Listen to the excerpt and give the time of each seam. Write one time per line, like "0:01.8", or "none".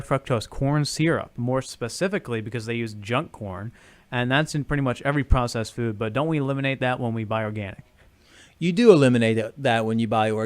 0:09.0